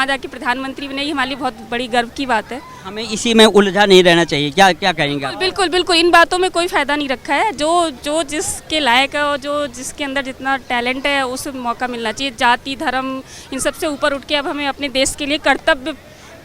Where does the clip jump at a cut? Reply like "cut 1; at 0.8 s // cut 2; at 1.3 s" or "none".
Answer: none